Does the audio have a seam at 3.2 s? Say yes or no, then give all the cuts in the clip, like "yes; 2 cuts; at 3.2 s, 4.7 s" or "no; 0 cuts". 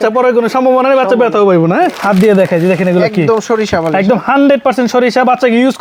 no; 1 cut; at 2.0 s